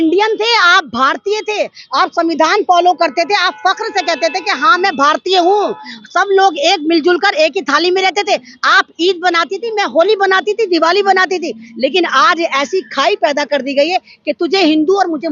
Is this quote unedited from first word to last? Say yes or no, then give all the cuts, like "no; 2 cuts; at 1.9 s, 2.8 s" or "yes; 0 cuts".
yes; 0 cuts